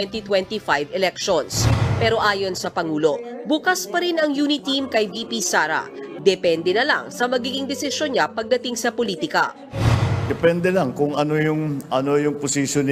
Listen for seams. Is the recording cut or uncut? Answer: cut